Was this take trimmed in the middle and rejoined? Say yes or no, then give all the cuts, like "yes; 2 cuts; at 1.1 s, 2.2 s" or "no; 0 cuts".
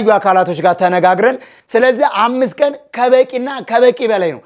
yes; 1 cut; at 1.5 s